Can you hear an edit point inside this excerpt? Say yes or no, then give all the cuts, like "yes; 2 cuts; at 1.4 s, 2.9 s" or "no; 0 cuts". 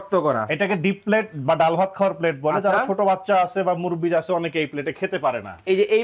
no; 0 cuts